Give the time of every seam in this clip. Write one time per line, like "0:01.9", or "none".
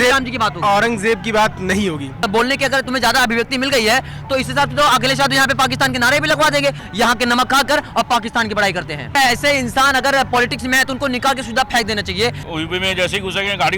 0:02.3
0:06.8
0:09.2
0:12.4